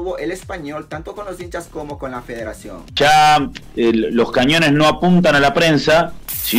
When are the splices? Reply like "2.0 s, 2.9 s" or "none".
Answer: 2.8 s